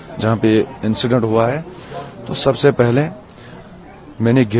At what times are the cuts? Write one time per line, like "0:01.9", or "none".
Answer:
none